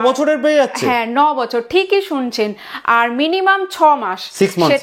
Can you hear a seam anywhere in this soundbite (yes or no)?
no